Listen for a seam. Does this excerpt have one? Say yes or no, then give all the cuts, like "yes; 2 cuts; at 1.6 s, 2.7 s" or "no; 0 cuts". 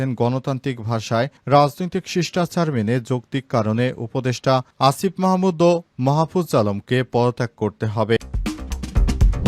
yes; 1 cut; at 8.2 s